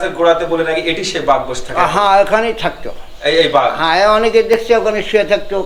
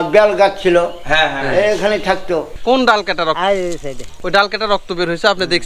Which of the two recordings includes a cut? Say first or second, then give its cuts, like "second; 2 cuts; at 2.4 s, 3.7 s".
second; 1 cut; at 2.5 s